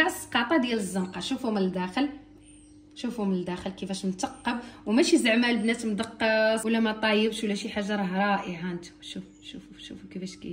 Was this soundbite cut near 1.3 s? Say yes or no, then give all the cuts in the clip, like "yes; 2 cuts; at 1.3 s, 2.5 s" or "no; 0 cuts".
no; 1 cut; at 6.6 s